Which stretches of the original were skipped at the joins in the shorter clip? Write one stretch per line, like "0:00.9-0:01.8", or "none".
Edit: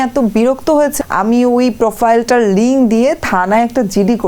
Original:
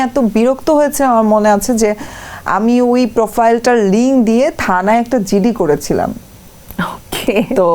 0:01.0-0:02.3

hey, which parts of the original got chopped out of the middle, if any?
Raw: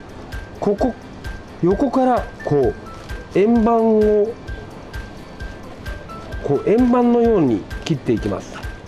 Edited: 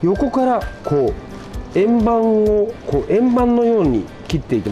0:04.4-0:06.4

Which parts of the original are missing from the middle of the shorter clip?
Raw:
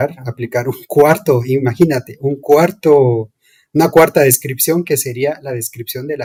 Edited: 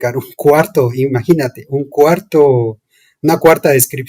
none

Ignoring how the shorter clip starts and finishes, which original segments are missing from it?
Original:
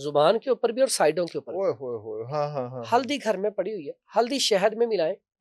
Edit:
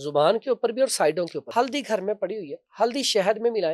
0:01.4-0:02.8

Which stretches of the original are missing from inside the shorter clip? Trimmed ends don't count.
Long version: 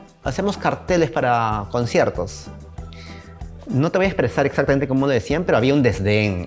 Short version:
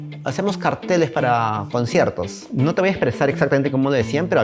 0:02.4-0:03.6

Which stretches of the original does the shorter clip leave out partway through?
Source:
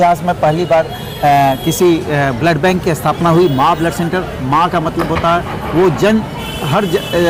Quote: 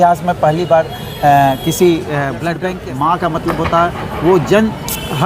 0:02.5-0:04.0

